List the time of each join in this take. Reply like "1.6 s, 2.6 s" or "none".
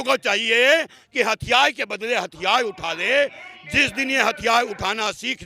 none